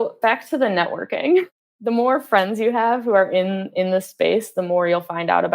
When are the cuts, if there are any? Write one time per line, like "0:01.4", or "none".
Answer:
0:01.5